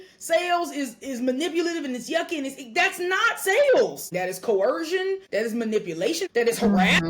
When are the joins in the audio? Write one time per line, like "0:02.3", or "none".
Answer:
0:04.1
0:05.2
0:06.2